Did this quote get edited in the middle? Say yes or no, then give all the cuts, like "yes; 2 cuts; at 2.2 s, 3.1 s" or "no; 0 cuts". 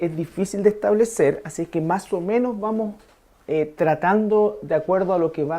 no; 0 cuts